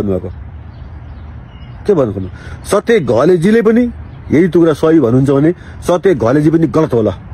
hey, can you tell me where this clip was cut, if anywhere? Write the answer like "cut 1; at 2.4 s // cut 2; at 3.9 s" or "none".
none